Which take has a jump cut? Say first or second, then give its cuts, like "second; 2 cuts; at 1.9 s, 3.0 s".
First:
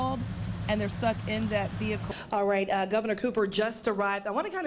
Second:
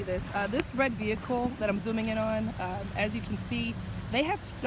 first; 1 cut; at 2.0 s